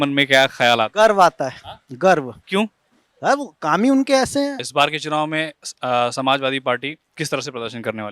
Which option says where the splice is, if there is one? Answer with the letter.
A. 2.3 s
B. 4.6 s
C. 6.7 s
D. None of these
B